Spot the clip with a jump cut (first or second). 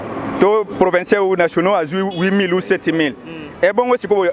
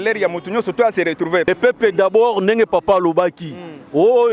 second